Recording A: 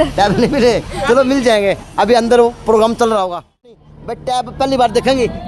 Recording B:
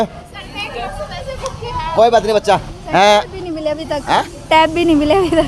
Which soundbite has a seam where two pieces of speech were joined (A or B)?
A